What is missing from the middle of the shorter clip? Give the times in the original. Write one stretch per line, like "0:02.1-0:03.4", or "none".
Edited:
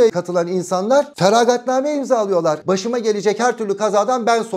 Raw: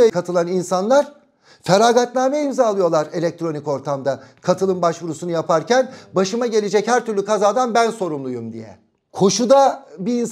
0:01.1-0:01.6
0:03.1-0:06.1

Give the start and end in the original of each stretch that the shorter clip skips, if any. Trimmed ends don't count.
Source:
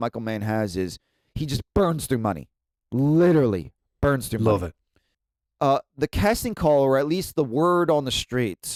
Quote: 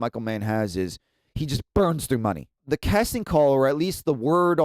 0:02.6-0:05.9

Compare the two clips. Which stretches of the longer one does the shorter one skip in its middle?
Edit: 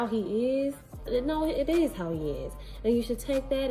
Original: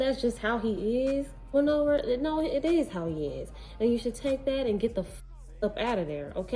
0:01.5-0:02.0

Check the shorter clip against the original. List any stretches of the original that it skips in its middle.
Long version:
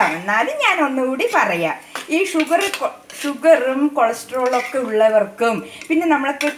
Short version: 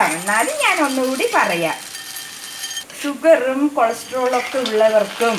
0:02.4-0:02.6

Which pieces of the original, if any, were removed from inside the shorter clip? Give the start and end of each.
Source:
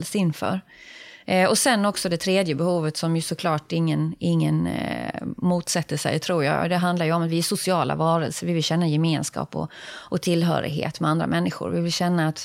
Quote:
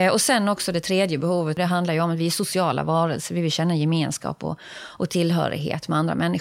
0:02.9-0:06.7

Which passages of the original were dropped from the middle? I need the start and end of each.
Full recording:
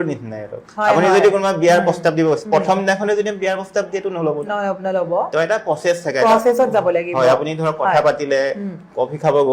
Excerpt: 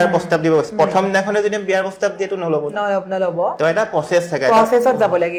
none

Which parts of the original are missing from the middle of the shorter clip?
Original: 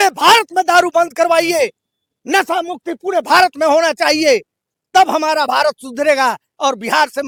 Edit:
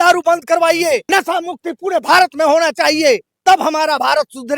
0:01.7-0:02.3
0:04.5-0:04.8

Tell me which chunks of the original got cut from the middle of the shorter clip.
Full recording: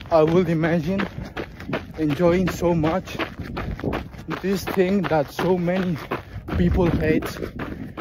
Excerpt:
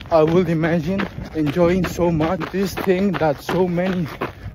0:01.2-0:01.8
0:03.1-0:04.3

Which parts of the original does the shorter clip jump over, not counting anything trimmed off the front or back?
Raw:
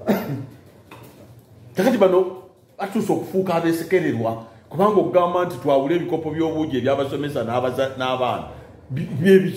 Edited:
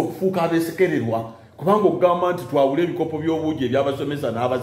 none

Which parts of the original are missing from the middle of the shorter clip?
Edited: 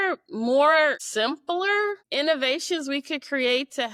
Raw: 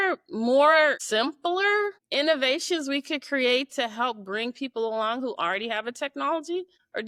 none

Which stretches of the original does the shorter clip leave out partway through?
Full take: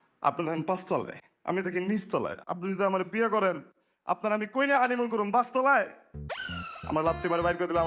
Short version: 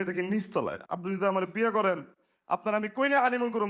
none

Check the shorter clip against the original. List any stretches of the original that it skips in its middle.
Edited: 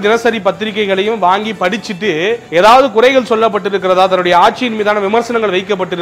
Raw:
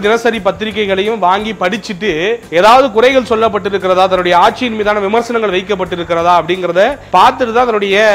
none

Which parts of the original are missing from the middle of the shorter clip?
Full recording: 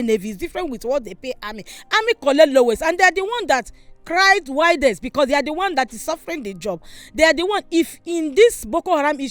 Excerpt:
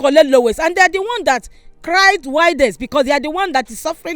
none

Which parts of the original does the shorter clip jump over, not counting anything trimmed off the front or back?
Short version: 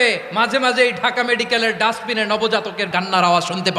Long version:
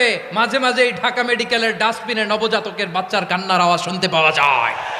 0:02.9-0:03.3

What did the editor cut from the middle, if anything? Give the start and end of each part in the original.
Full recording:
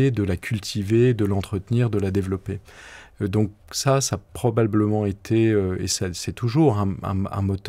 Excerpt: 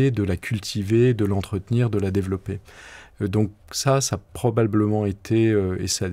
none

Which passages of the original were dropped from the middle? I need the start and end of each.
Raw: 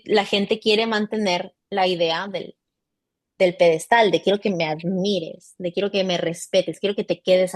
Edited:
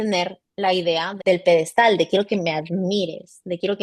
0:02.3-0:03.3

